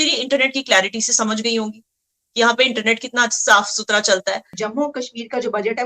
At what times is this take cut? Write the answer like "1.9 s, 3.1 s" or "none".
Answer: 4.5 s